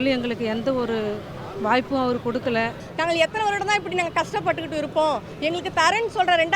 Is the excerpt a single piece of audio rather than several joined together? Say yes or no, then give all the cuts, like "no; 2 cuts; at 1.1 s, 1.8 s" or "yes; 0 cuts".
no; 1 cut; at 2.8 s